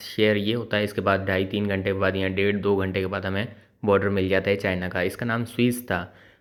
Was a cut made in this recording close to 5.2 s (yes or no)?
no